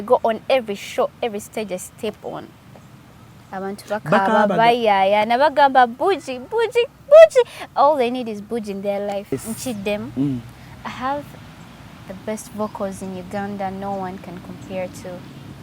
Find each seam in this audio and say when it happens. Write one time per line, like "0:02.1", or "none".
0:09.3

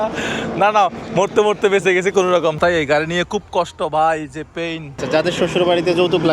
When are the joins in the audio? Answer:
0:02.6
0:04.9

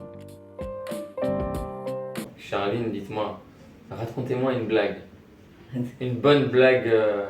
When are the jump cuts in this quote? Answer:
0:02.4

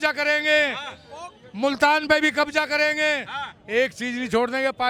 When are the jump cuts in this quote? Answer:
none

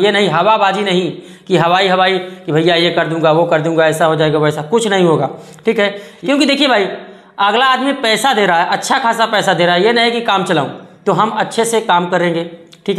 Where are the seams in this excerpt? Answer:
0:06.1

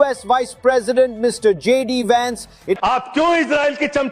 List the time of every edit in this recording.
0:02.8

